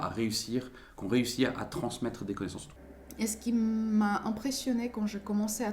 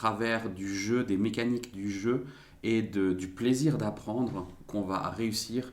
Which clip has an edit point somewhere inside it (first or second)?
first